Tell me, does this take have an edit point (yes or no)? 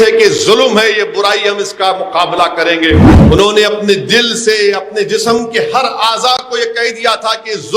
yes